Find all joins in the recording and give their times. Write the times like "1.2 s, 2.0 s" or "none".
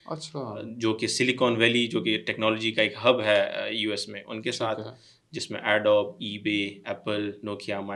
none